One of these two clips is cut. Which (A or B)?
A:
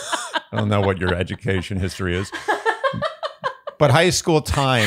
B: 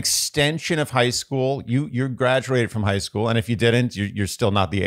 A